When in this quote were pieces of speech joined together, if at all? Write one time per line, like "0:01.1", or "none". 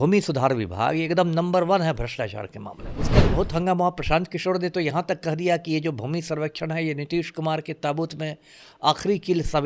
0:03.1